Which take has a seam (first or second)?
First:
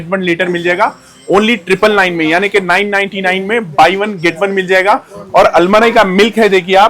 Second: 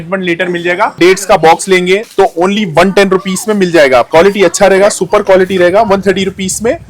second